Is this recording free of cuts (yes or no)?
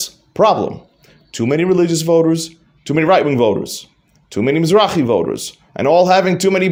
yes